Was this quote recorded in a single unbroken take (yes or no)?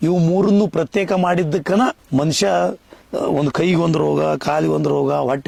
yes